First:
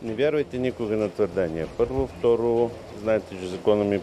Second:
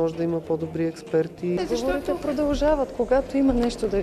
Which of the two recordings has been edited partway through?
second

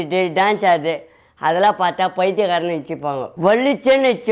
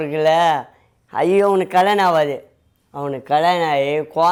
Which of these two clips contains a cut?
first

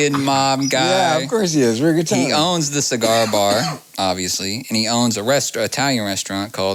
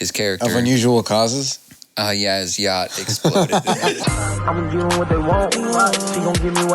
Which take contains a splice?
second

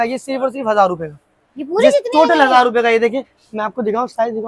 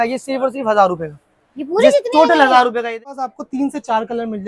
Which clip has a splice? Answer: second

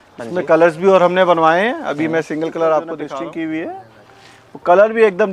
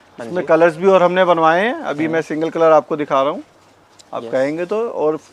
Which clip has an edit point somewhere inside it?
first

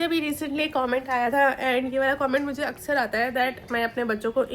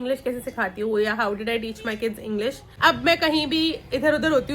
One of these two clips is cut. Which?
second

